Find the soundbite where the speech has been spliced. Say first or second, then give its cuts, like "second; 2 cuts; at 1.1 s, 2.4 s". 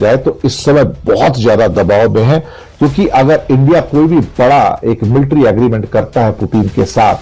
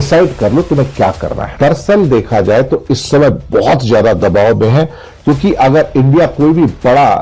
second; 1 cut; at 1.5 s